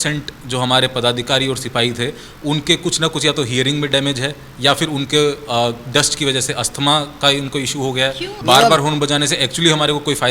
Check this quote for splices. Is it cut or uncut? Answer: cut